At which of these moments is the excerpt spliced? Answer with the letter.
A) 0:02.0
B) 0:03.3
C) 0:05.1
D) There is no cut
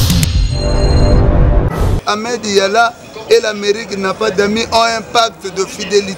A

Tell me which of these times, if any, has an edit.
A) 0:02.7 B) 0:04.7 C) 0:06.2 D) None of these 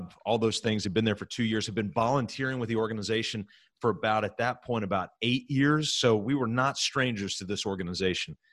C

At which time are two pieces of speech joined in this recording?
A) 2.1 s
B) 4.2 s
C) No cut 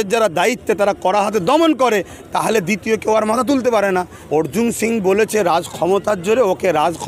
B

